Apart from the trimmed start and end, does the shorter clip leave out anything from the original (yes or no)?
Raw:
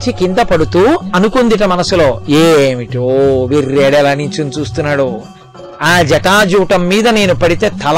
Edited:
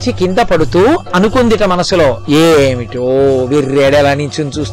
no